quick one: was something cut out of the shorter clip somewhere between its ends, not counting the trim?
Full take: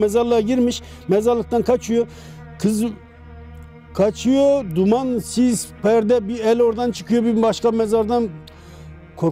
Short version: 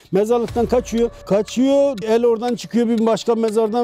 yes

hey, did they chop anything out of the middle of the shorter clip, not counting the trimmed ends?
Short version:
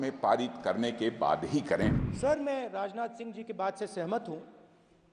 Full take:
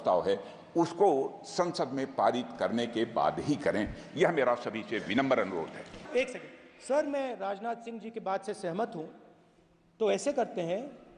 yes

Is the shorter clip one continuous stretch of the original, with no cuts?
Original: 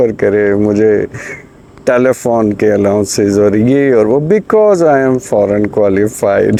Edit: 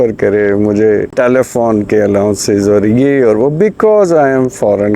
no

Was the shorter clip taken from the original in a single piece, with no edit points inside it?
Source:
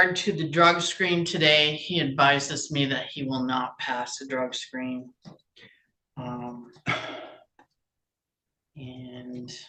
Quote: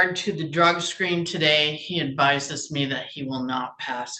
yes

